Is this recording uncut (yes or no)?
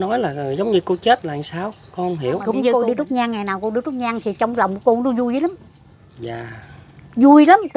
no